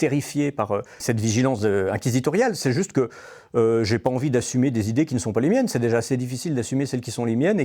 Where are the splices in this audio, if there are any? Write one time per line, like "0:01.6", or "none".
0:00.9

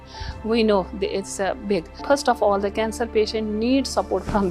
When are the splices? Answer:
0:01.9

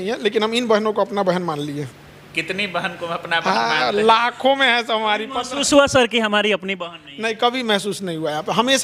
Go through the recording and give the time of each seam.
none

